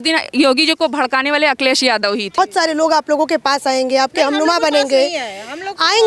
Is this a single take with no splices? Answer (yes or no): no